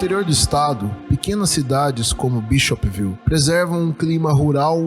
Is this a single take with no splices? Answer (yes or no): no